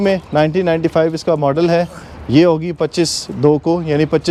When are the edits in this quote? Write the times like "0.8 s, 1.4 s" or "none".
none